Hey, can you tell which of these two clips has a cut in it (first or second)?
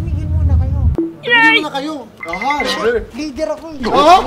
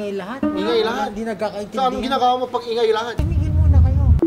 first